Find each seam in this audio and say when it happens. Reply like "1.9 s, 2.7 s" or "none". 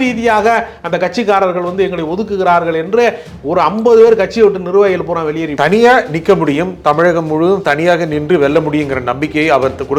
5.5 s